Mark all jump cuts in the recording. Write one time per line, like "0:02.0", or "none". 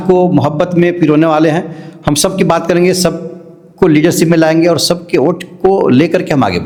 none